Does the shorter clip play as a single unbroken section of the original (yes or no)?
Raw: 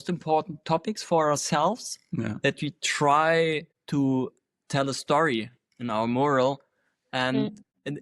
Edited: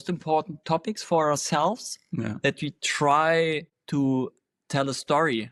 yes